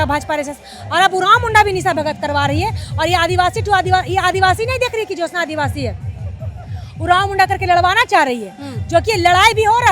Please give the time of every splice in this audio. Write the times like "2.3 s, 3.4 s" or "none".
none